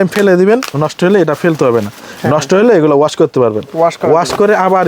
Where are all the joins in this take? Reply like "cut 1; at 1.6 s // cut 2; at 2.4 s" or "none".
none